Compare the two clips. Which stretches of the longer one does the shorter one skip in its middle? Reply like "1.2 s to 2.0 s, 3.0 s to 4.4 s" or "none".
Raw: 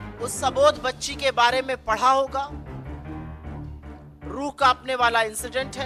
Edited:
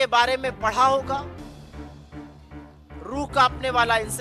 none